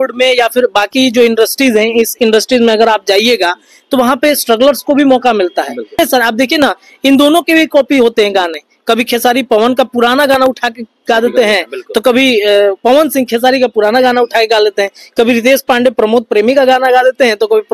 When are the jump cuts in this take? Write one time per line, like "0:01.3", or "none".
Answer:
0:06.0